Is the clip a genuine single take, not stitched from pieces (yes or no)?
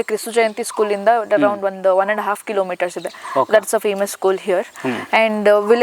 yes